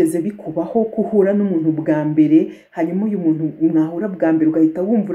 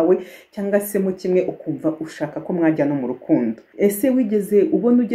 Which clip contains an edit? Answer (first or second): second